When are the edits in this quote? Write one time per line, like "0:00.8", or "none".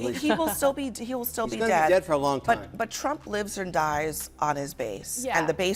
none